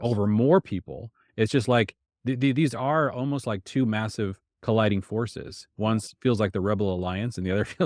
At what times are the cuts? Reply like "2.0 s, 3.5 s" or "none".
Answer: none